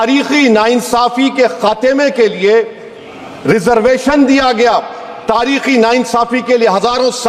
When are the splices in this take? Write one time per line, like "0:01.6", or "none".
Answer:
none